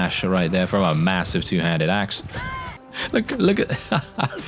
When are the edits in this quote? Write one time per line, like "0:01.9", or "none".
0:02.8